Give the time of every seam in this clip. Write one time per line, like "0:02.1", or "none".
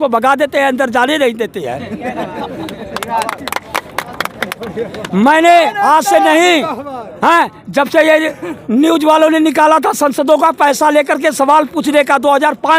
none